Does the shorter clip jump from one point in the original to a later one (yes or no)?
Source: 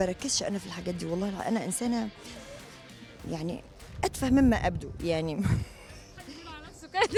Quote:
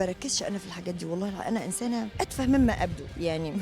yes